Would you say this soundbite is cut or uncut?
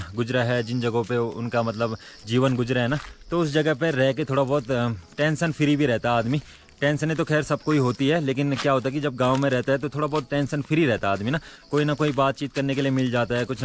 uncut